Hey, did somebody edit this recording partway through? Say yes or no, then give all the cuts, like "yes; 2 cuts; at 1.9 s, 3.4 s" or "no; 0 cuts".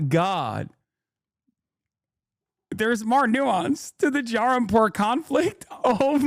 no; 0 cuts